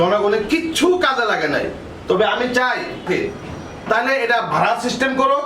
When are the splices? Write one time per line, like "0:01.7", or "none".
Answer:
0:03.0